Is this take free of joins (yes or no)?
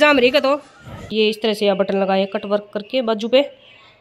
no